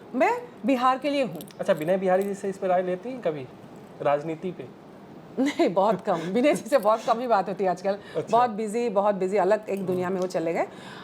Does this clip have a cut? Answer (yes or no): no